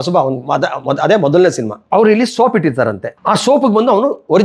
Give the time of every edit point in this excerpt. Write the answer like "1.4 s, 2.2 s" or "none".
1.7 s, 3.1 s